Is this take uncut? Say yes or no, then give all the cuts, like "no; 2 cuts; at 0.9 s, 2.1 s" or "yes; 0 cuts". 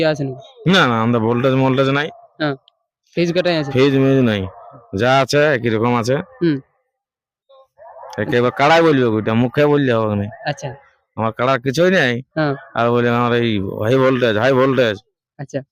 yes; 0 cuts